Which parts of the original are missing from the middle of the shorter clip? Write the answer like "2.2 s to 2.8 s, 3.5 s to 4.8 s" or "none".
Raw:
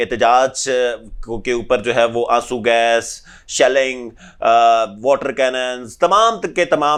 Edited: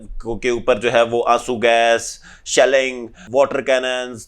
4.3 s to 4.9 s

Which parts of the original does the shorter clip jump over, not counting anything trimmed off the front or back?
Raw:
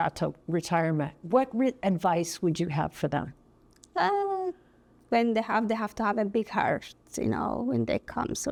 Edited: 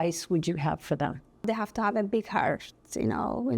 3.6 s to 5.7 s

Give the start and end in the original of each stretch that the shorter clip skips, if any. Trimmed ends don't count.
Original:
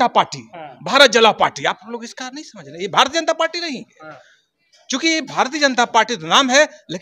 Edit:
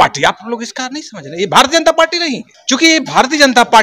3.9 s to 4.7 s

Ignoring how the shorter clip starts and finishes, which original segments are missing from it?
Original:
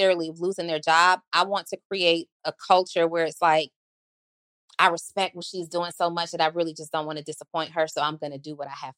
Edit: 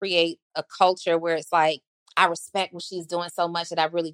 3.8 s to 4.6 s

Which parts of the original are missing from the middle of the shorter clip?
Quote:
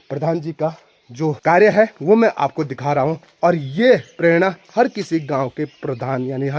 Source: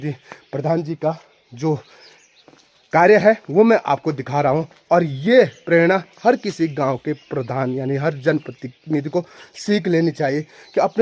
1.8 s to 2.9 s

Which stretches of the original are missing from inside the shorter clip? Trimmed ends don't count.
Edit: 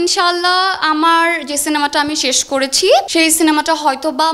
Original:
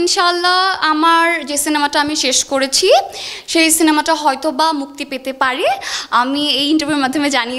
3.1 s to 3.5 s

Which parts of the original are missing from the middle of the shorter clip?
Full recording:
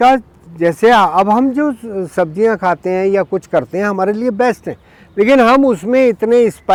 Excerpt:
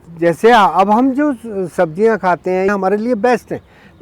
3.1 s to 3.8 s

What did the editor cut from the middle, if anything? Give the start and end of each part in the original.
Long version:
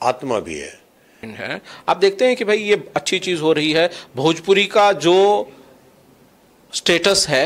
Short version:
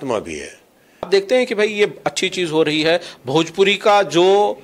1.3 s to 2.0 s

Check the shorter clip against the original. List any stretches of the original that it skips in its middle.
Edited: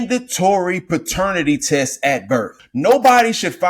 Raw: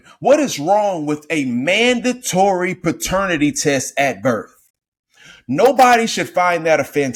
4.5 s to 5.3 s

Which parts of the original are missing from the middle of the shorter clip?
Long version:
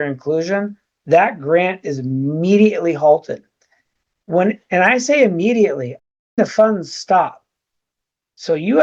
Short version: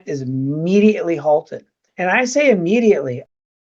3.7 s to 4.7 s

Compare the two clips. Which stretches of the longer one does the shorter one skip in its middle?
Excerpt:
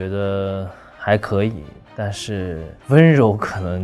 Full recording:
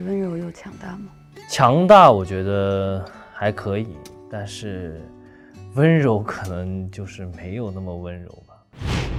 5.1 s to 5.6 s

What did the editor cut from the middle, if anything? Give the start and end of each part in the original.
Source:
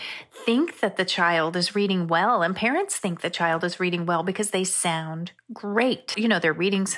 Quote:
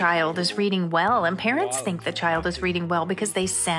none

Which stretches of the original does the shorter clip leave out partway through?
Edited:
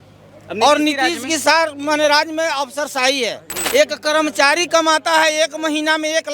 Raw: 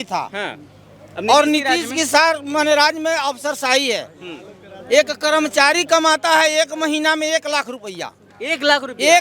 4.2 s to 4.7 s

